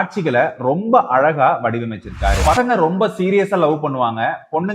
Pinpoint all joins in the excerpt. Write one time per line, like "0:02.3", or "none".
0:02.5